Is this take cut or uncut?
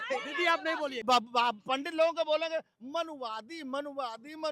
cut